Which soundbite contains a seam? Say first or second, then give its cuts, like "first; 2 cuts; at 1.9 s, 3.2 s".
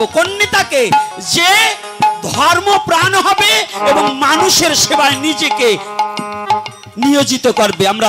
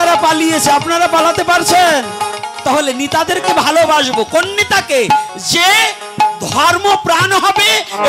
second; 1 cut; at 2.4 s